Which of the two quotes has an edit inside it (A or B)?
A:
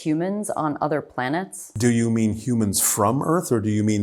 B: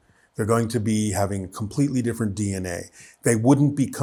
A